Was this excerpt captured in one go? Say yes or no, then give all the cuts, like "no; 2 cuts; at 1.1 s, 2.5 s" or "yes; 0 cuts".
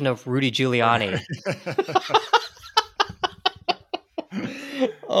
yes; 0 cuts